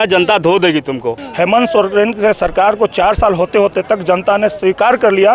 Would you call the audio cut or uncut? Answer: cut